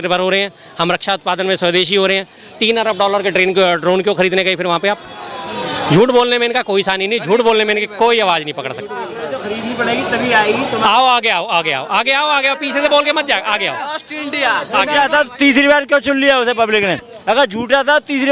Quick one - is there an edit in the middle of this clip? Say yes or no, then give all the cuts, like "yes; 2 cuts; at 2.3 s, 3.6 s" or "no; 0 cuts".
no; 0 cuts